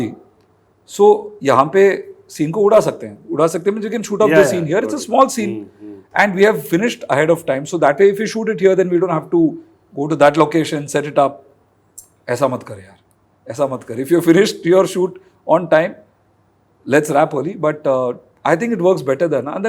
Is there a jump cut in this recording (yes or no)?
no